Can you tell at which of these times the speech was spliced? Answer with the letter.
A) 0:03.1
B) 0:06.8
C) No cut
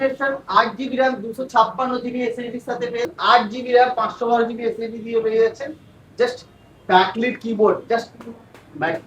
A